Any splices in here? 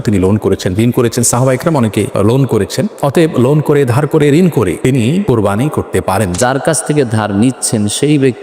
yes; 3 cuts; at 2.1 s, 4.9 s, 6.4 s

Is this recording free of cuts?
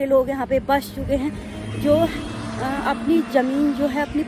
yes; 0 cuts

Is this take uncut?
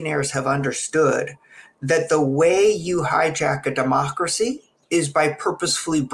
yes; 0 cuts

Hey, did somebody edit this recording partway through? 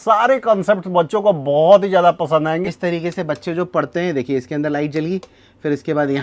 yes; 1 cut; at 2.7 s

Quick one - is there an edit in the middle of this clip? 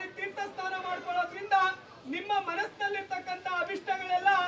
no; 0 cuts

